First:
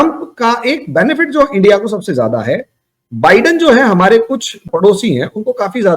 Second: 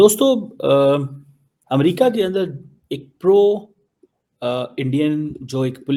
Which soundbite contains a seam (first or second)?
first